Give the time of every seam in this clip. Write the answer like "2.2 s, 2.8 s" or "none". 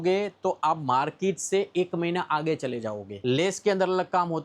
3.2 s